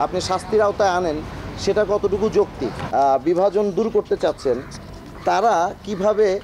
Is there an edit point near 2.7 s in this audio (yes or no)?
yes